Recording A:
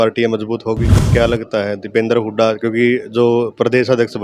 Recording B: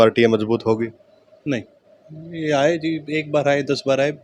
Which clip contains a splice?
A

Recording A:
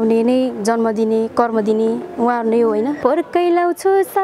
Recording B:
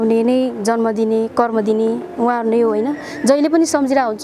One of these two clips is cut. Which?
A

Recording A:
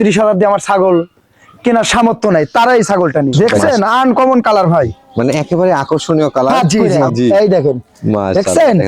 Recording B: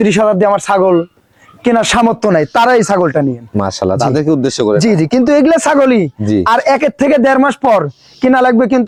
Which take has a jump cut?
A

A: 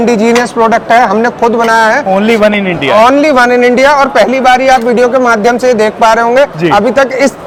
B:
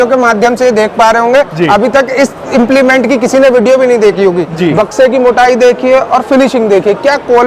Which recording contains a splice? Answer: B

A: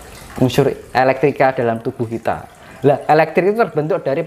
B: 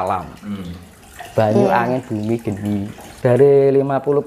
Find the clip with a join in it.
B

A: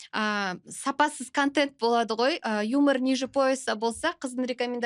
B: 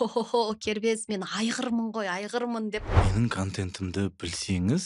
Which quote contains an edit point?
B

